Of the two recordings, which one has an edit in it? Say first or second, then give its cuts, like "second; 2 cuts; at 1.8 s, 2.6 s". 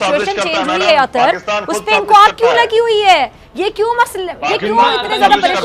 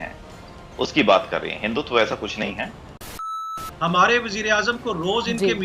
second; 1 cut; at 3.3 s